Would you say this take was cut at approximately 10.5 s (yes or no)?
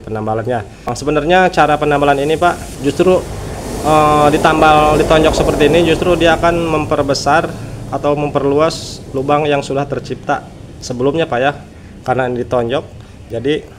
no